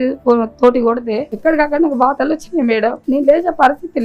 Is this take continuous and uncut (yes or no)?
no